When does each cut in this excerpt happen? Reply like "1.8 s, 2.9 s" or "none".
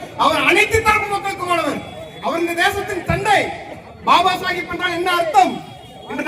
none

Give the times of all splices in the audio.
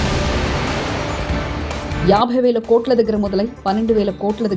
1.9 s

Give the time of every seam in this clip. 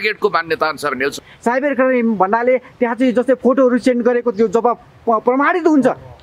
1.3 s

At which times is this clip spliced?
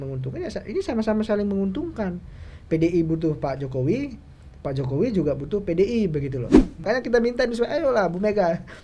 6.8 s

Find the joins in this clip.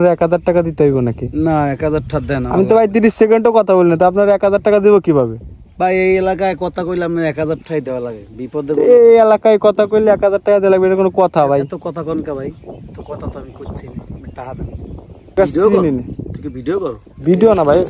15.4 s

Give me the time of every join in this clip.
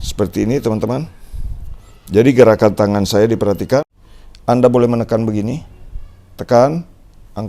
4.0 s

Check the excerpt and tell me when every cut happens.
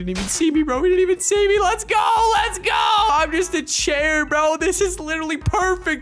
3.1 s

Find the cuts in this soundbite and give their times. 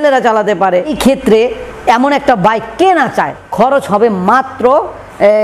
0.9 s, 3.3 s

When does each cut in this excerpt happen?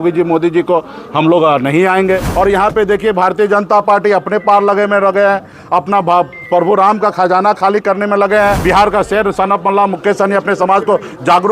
2.3 s, 8.6 s

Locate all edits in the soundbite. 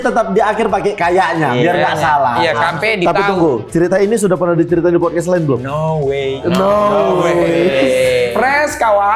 2.7 s

